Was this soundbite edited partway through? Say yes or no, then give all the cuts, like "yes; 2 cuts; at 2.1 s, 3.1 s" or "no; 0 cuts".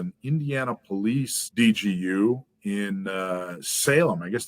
yes; 1 cut; at 1.4 s